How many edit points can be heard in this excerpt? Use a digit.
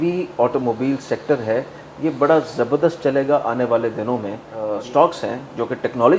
1